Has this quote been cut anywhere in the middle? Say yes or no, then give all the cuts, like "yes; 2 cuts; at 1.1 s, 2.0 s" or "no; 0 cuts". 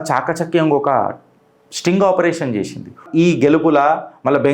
yes; 1 cut; at 3.0 s